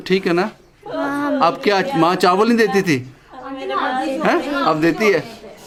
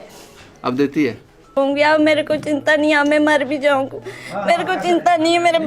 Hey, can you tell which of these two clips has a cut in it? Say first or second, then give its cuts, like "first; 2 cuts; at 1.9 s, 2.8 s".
second; 1 cut; at 1.6 s